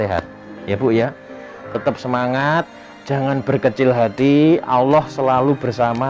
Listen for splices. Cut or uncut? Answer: uncut